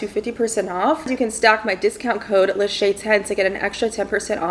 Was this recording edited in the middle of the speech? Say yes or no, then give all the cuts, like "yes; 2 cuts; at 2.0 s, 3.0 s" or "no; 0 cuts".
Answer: yes; 1 cut; at 1.1 s